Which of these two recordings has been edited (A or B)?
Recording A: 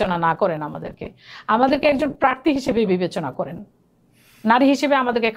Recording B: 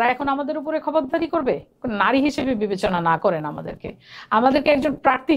B